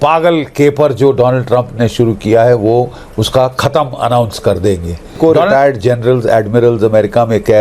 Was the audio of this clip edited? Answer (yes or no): yes